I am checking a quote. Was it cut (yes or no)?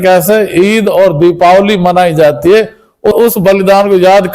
yes